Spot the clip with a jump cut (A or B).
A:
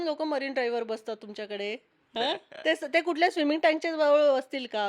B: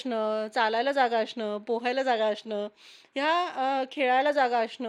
A